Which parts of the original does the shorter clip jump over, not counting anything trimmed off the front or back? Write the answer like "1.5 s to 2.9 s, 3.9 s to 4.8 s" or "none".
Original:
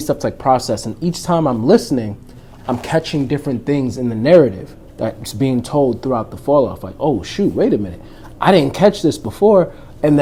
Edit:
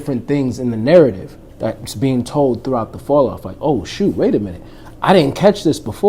none